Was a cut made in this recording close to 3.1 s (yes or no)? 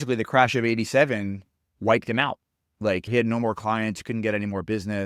yes